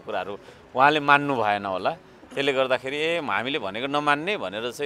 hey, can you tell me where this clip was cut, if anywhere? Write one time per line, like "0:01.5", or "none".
none